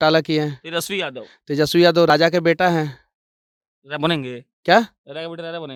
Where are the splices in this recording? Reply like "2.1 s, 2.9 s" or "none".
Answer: none